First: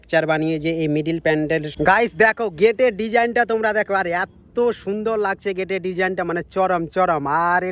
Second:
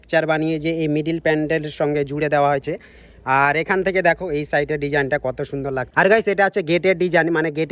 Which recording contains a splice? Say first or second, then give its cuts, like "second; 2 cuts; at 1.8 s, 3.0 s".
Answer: first; 1 cut; at 1.7 s